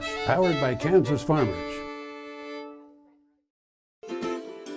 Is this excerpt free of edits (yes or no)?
no